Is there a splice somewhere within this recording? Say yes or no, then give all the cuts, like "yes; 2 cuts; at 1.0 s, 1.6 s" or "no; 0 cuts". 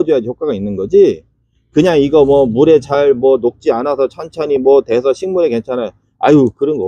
no; 0 cuts